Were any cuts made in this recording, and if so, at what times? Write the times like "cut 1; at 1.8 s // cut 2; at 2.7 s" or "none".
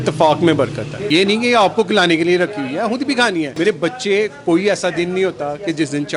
cut 1; at 0.9 s // cut 2; at 3.5 s